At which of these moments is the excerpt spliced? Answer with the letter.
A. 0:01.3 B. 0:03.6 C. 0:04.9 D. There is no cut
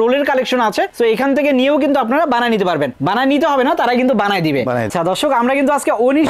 C